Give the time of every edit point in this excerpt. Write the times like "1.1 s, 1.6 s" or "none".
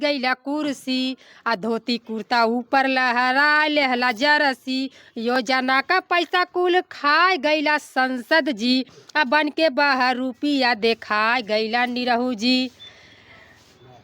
none